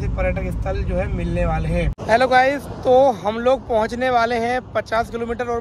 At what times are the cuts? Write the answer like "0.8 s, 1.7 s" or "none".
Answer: 1.9 s